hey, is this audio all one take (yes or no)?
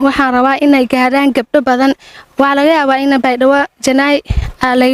yes